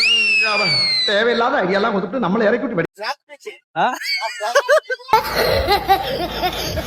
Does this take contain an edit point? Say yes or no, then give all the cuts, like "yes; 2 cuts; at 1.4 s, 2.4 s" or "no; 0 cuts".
yes; 1 cut; at 2.8 s